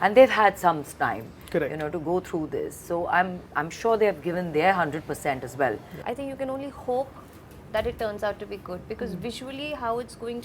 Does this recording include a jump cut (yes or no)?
yes